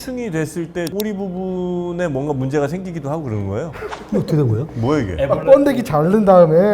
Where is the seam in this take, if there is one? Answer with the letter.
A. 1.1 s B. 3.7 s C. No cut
B